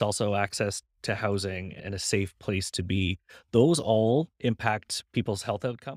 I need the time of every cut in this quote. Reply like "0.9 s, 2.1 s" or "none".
1.7 s, 4.3 s